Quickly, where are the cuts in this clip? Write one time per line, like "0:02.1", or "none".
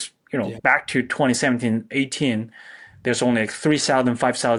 none